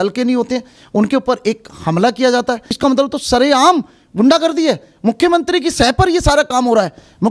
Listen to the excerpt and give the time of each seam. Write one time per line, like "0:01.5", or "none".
0:02.7